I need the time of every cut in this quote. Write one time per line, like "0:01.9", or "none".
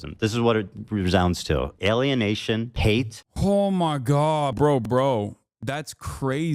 0:03.2
0:04.5
0:05.5